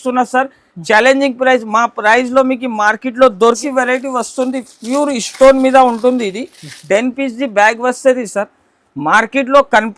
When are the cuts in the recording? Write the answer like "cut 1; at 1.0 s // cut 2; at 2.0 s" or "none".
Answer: cut 1; at 3.6 s